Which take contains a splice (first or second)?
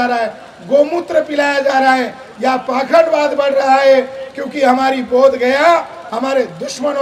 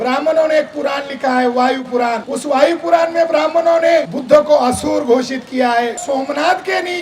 second